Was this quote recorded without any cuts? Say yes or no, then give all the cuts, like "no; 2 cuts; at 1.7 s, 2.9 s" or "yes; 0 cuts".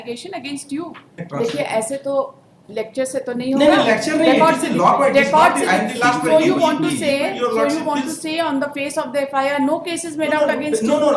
no; 1 cut; at 1.1 s